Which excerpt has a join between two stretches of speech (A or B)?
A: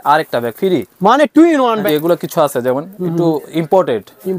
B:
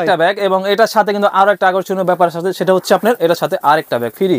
A